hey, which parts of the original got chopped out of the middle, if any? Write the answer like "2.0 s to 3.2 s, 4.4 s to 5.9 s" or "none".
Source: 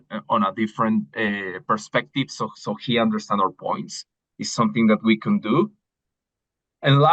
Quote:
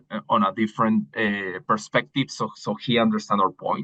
none

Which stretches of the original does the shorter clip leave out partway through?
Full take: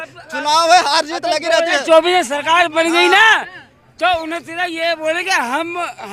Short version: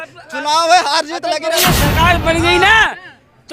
1.6 s to 2.1 s

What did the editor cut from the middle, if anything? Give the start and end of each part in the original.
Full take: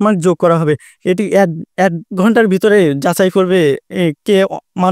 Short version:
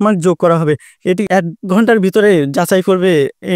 1.2 s to 1.7 s

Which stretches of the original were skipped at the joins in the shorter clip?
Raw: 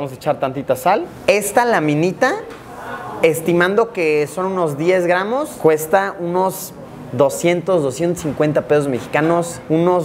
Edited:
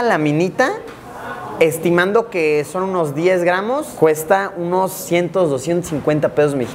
6.7 s to 7.4 s

